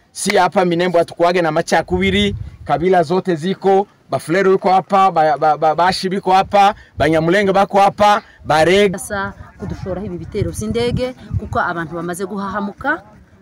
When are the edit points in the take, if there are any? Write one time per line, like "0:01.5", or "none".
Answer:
0:08.9